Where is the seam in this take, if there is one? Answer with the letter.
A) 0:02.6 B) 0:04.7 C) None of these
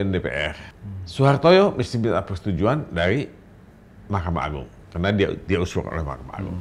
C